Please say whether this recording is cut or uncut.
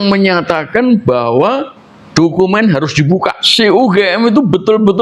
cut